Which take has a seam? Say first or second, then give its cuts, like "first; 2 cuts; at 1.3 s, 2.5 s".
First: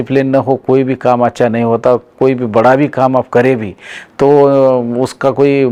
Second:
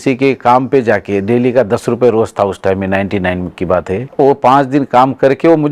second; 1 cut; at 4.1 s